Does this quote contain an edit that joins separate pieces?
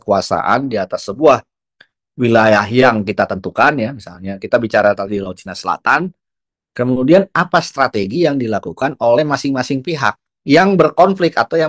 no; 0 cuts

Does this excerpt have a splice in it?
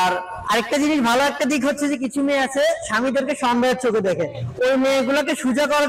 no; 0 cuts

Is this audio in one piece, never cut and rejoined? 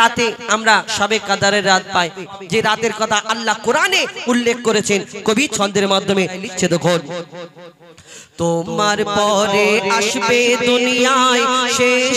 no; 2 cuts; at 2.3 s, 6.4 s

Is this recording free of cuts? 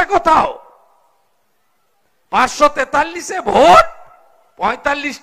yes; 0 cuts

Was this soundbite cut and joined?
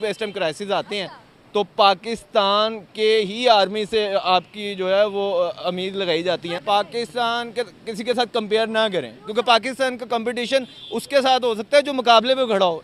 yes; 1 cut; at 6.6 s

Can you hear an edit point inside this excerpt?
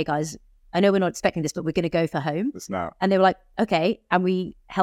no; 0 cuts

